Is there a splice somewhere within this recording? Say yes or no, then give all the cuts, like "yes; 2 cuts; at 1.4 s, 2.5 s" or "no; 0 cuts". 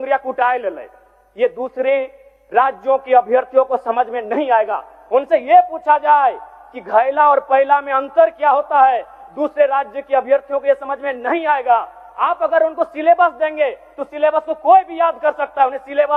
no; 0 cuts